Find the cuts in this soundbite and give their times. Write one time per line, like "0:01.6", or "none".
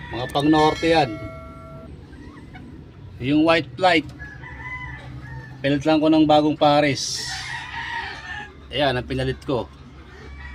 0:08.5